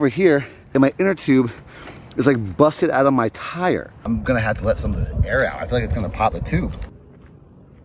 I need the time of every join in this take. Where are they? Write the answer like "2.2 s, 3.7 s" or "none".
3.9 s, 6.9 s